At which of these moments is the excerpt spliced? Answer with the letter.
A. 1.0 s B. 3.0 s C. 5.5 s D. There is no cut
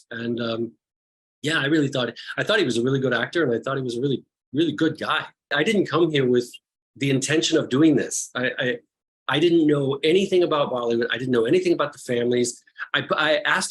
C